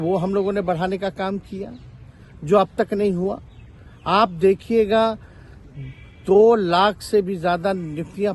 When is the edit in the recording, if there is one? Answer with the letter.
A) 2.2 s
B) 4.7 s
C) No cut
C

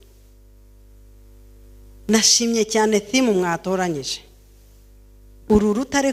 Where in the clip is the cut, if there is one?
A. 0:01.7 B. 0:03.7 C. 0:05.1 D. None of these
D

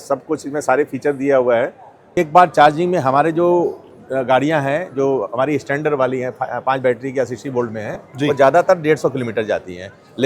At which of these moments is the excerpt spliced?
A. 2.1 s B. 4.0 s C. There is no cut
A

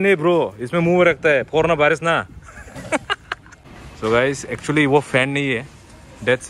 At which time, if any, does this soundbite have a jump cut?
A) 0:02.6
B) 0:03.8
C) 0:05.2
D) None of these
B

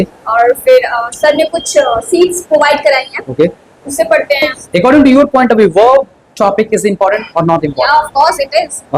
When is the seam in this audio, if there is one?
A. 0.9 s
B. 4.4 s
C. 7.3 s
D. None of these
B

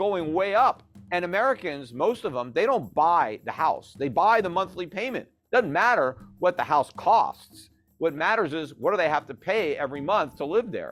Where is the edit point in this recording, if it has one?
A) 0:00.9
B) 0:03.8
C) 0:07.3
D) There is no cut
A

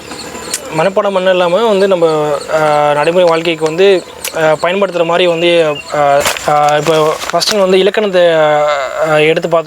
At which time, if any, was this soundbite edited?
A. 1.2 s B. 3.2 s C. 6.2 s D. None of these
C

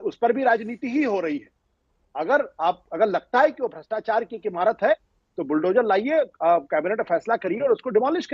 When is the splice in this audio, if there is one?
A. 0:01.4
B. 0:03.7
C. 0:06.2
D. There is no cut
D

